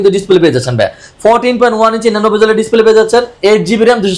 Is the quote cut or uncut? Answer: uncut